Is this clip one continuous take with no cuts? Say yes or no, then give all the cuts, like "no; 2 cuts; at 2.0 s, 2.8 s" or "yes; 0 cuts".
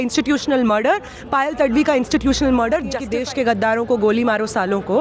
no; 1 cut; at 3.1 s